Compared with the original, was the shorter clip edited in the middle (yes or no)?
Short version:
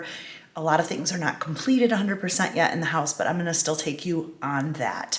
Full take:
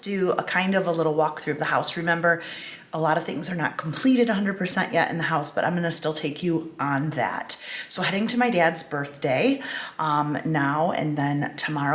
no